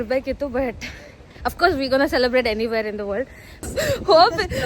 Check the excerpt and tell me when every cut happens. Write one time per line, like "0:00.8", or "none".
0:03.6